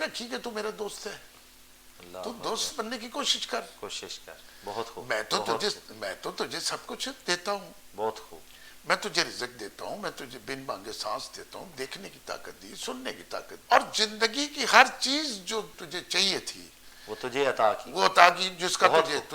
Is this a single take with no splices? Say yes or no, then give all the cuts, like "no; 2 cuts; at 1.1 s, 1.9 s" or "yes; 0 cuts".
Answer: no; 2 cuts; at 13.5 s, 15.8 s